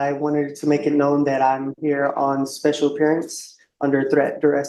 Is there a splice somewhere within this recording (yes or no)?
no